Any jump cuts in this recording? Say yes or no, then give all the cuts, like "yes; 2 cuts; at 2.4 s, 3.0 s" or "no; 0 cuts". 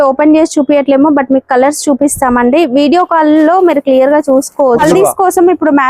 yes; 1 cut; at 4.8 s